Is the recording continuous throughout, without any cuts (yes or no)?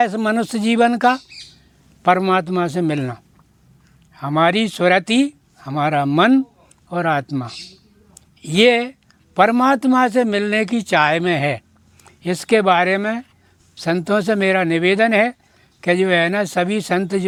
yes